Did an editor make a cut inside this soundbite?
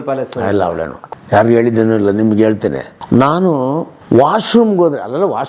yes; 3 cuts; at 1.0 s, 2.9 s, 3.9 s

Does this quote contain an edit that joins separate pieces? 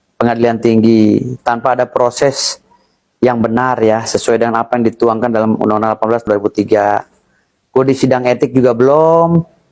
yes; 1 cut; at 6.3 s

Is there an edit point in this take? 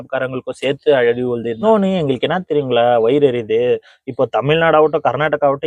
yes; 1 cut; at 1.6 s

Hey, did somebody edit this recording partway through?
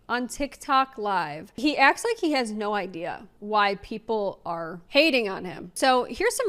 yes; 1 cut; at 1.4 s

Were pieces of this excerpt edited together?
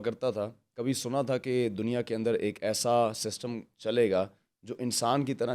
no; 0 cuts

